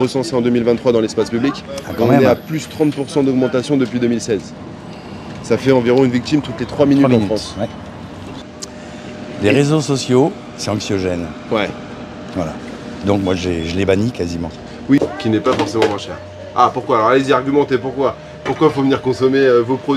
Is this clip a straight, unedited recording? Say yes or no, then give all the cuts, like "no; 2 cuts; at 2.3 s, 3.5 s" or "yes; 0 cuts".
no; 2 cuts; at 8.3 s, 15.0 s